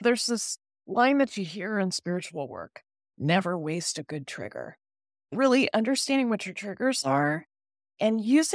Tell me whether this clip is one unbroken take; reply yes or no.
yes